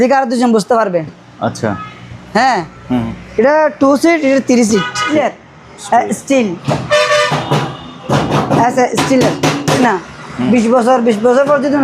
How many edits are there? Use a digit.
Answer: 2